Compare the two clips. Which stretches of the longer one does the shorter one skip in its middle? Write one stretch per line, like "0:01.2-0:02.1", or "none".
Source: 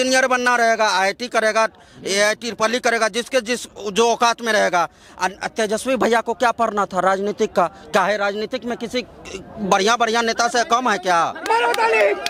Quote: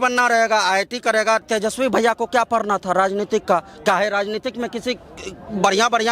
0:01.7-0:05.5